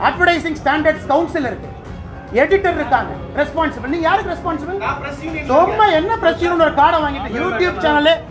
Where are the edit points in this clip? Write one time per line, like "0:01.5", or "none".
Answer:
none